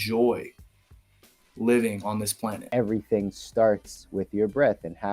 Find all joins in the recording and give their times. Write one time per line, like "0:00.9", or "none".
0:02.7